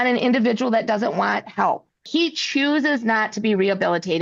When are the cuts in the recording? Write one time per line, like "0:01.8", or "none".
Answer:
0:02.0